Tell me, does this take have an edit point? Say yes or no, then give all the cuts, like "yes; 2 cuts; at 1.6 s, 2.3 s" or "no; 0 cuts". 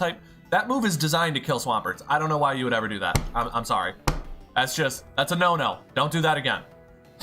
no; 0 cuts